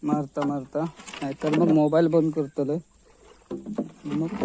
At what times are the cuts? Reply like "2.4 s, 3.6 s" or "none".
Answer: none